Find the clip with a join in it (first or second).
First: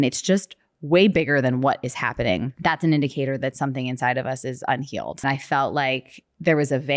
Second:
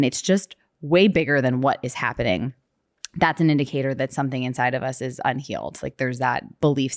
first